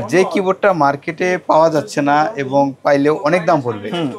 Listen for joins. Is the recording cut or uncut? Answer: uncut